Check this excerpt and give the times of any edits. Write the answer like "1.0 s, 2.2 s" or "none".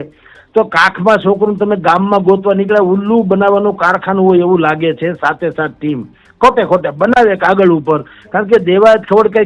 none